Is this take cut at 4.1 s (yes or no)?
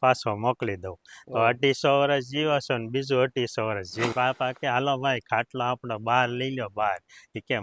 yes